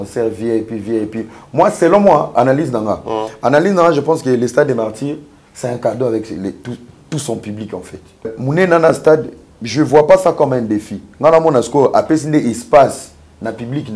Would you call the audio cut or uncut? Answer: cut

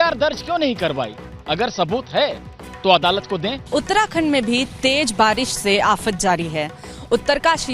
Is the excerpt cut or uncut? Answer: cut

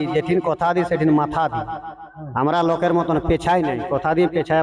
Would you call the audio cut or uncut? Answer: uncut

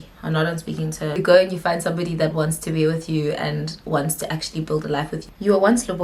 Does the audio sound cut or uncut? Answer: cut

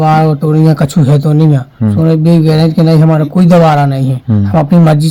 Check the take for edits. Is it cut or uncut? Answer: uncut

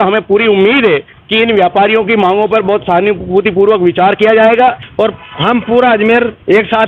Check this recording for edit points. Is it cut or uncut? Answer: cut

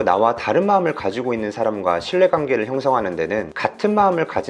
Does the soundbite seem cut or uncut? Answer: cut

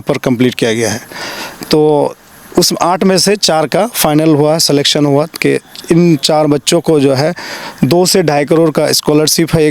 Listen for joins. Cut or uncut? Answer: uncut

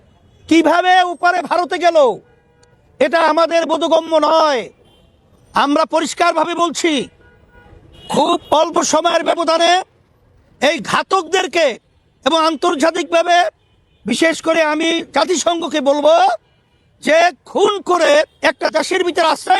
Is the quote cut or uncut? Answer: uncut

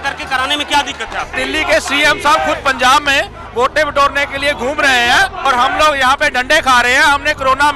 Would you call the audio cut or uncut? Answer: cut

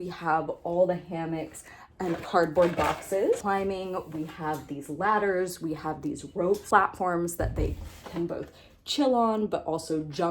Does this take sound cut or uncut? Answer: cut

